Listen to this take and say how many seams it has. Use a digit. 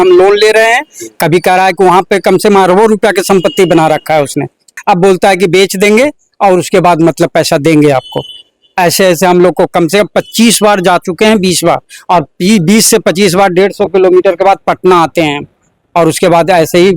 1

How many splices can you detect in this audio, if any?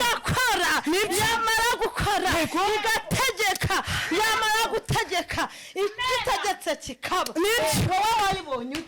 0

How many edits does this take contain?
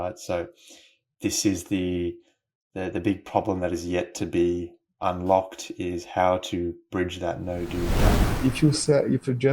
1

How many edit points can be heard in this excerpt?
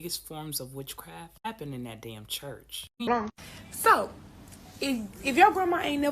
1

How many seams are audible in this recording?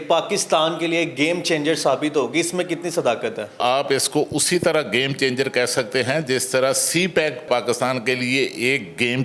1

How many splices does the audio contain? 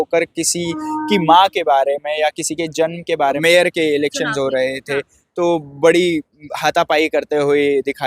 1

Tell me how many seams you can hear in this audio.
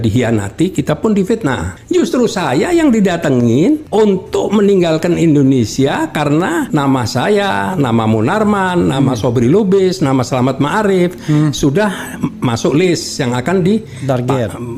3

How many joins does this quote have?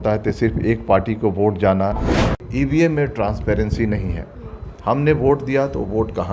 1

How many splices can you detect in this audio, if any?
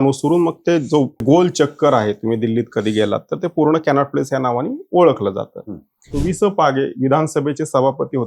2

